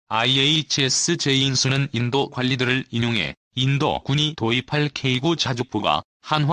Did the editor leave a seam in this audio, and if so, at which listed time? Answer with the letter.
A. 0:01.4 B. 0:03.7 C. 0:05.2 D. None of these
A